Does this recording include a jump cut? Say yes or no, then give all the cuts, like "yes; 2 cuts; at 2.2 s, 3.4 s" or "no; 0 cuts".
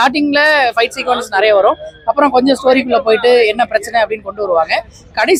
no; 0 cuts